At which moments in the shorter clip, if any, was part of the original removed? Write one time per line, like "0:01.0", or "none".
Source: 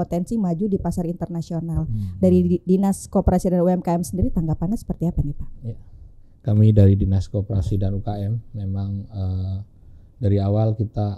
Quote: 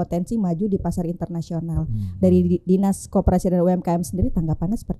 none